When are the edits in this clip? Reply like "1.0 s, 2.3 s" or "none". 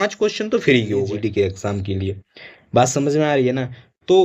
1.1 s